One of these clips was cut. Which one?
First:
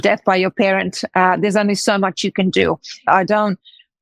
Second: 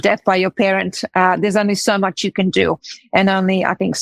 first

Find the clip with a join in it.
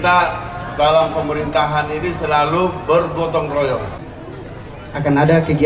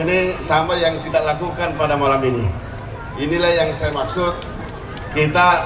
first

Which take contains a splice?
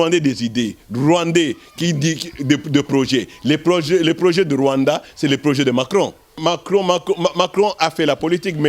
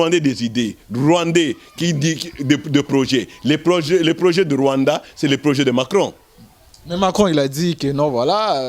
first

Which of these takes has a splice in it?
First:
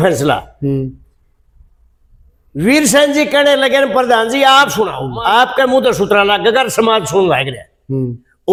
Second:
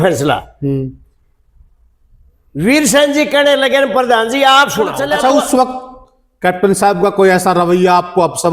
second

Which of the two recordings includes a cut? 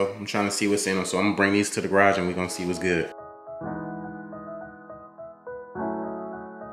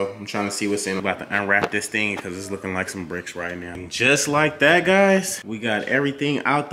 second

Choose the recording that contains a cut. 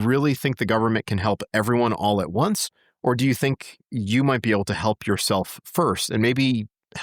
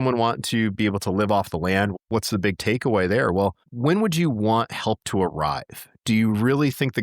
second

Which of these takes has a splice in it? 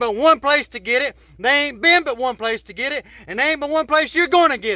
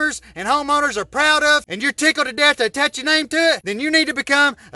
second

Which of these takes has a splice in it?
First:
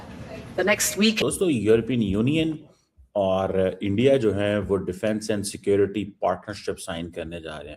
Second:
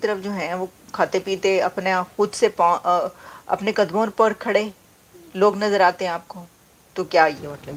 first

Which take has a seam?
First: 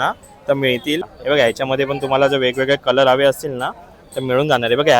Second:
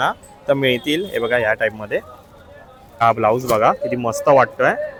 first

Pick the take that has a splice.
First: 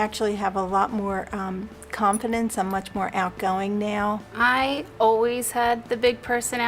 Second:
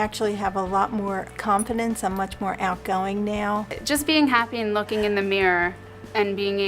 second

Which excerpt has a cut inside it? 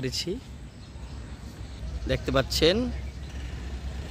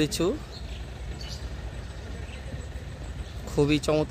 first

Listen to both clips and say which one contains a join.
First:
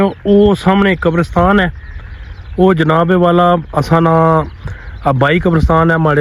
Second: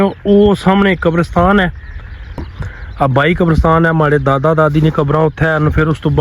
second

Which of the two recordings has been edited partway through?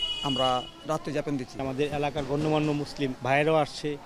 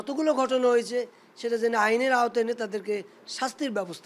first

